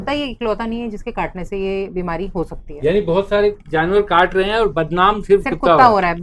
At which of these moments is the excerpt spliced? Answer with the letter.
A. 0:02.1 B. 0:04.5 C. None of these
C